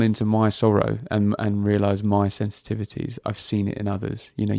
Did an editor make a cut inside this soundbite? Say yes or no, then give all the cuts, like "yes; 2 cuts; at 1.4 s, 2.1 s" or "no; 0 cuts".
no; 0 cuts